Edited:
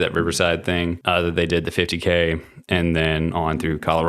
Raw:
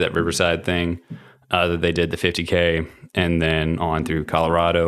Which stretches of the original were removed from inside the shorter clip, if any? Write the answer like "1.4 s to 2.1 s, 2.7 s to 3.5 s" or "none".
1.0 s to 1.4 s